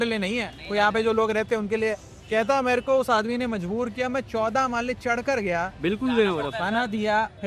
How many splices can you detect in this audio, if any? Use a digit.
0